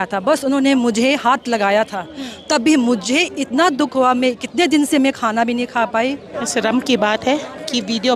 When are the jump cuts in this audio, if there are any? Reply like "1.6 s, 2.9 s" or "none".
6.3 s